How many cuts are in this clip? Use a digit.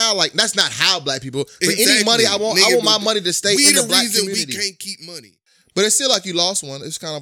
1